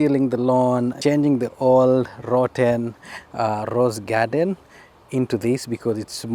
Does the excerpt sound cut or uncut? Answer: cut